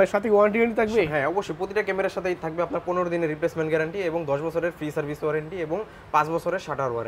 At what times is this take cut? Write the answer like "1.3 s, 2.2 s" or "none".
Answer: none